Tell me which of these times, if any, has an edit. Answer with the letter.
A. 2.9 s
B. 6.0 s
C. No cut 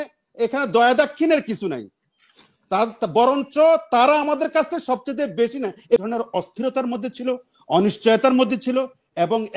B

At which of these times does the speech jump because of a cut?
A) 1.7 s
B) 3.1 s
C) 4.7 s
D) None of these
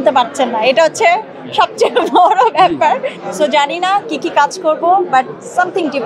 B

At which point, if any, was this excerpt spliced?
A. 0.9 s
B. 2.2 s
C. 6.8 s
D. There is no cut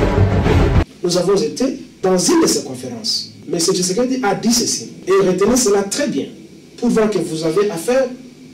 A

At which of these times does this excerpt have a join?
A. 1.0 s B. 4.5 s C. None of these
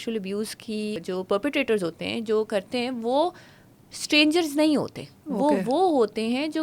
A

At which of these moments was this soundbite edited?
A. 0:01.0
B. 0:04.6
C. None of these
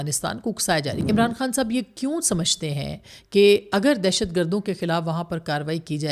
A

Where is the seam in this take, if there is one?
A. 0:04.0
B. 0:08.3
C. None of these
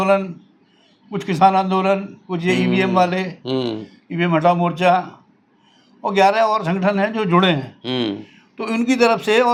C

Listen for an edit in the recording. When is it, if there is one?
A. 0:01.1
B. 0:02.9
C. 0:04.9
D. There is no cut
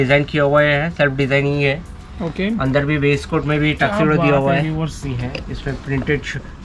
C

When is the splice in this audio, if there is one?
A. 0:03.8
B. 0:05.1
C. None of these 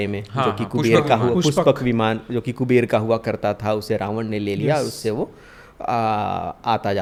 C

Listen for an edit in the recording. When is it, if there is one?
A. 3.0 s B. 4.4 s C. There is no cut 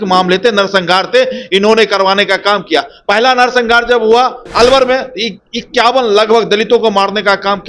B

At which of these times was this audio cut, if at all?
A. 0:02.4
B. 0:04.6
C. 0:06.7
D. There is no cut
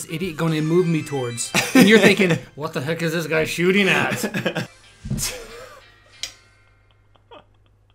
B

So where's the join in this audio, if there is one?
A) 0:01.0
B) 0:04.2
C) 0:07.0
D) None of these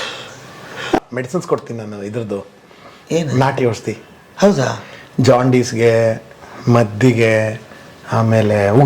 A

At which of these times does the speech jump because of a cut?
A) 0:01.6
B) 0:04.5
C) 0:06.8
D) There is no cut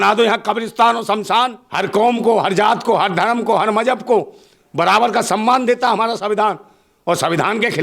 A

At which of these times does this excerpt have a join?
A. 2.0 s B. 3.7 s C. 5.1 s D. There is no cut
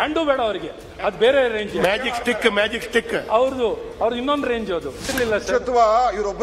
C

